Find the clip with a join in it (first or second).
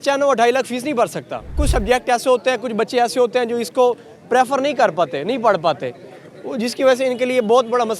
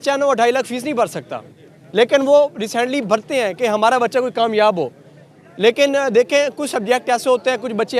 first